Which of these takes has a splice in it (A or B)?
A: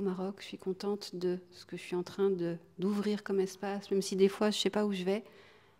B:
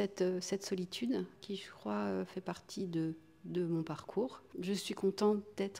B